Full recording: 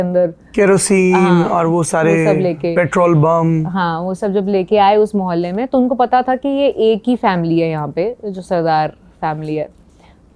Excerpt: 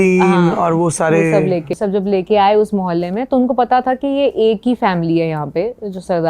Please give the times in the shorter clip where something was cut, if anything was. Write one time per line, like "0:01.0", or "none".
0:01.7